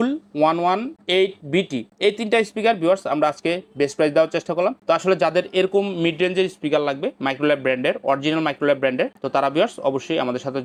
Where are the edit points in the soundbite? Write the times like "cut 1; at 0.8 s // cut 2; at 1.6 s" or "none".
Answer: none

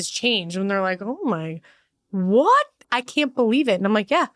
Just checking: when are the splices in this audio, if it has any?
cut 1; at 2.9 s

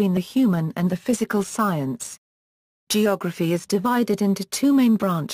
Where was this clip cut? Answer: none

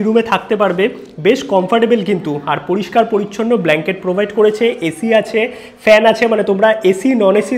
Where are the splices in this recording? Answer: none

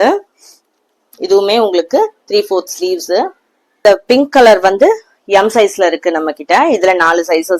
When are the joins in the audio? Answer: cut 1; at 3.8 s

